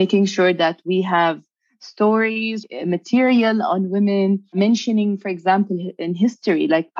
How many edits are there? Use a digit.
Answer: 2